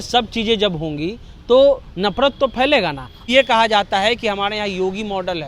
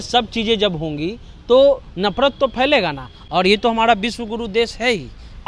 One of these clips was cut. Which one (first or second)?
first